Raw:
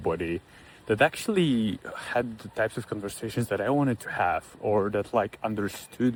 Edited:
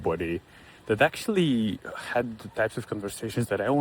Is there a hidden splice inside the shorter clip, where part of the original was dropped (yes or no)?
no